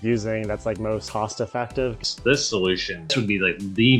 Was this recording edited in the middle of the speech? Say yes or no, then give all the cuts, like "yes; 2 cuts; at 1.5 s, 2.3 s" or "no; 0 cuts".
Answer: yes; 3 cuts; at 1.1 s, 2.0 s, 3.1 s